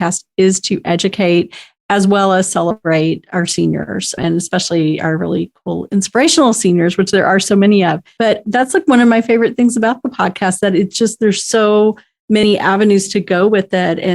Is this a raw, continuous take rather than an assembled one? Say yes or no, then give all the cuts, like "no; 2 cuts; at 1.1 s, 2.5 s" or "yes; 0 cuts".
no; 2 cuts; at 4.2 s, 8.3 s